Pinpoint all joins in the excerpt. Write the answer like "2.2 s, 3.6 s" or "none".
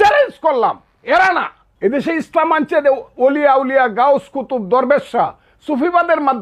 1.6 s